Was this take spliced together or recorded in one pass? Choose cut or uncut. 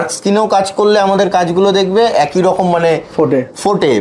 uncut